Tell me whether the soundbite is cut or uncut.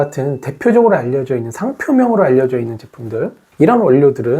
cut